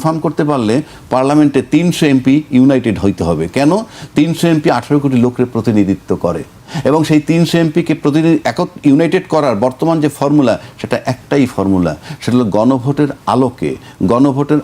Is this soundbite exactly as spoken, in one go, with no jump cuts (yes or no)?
yes